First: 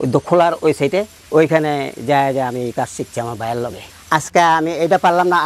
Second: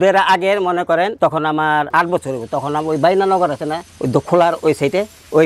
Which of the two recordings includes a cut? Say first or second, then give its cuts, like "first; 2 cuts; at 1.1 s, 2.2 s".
first; 1 cut; at 3.8 s